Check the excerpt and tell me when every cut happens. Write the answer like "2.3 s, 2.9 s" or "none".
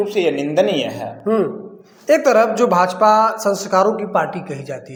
none